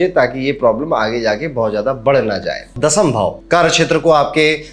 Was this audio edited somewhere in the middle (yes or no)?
yes